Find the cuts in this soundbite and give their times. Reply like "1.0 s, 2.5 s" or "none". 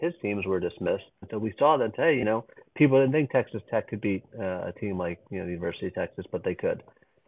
1.3 s

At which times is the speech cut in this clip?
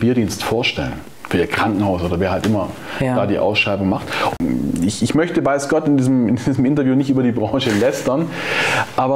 4.3 s

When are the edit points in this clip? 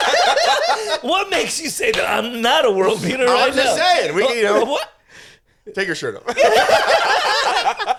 none

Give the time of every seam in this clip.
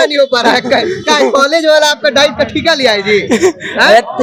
none

